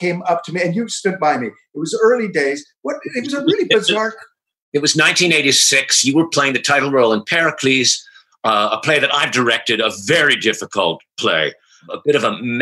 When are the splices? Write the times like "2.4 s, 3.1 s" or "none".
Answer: none